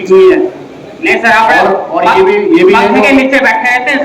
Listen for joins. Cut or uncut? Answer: uncut